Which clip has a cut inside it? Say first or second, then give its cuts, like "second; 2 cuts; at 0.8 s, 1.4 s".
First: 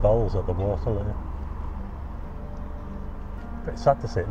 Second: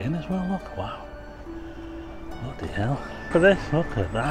second; 1 cut; at 3.3 s